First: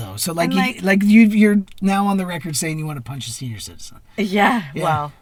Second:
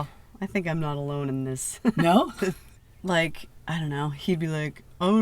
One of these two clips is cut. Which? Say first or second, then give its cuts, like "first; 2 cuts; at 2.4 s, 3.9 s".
second; 1 cut; at 2.7 s